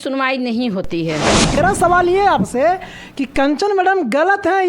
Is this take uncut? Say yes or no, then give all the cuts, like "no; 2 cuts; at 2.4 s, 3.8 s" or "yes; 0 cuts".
no; 1 cut; at 1.5 s